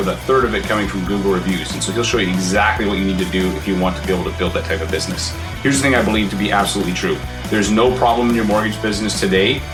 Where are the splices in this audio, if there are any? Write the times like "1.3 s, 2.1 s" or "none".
none